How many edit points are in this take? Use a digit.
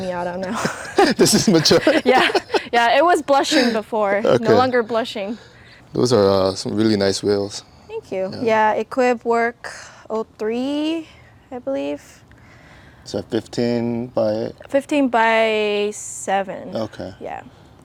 0